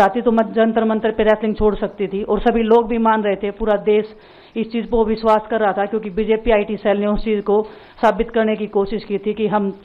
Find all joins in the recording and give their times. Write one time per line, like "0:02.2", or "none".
none